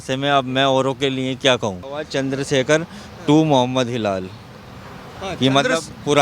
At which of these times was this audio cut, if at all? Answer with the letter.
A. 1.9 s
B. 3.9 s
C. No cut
A